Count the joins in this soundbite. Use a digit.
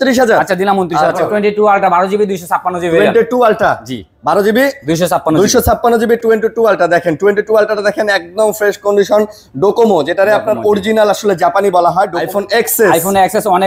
2